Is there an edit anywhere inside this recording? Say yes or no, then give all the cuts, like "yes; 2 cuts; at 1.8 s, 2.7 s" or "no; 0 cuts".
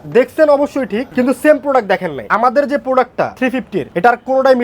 yes; 3 cuts; at 1.0 s, 2.2 s, 3.6 s